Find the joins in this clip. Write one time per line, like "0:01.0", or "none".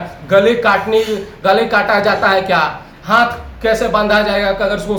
none